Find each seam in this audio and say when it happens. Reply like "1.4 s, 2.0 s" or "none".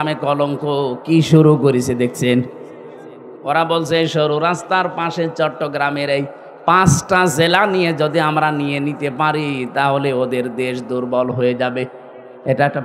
3.3 s